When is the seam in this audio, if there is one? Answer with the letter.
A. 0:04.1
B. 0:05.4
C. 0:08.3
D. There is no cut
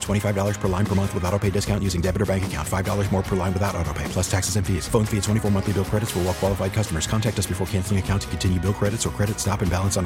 D